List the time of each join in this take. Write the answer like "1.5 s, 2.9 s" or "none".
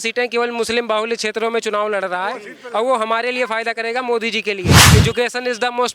4.8 s